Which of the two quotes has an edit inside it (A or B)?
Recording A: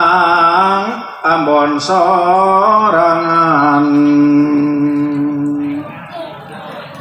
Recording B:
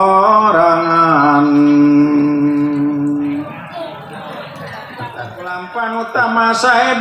B